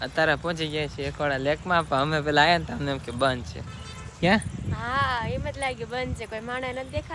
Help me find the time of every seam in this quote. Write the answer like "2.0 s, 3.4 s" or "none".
none